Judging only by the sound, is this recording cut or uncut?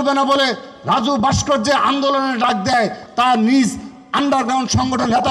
cut